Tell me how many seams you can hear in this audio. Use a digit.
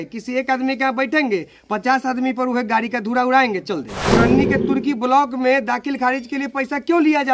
1